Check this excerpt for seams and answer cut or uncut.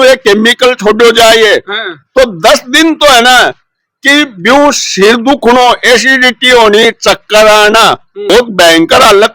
cut